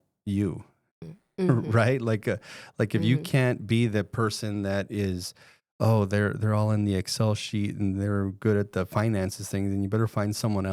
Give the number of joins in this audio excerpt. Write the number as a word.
zero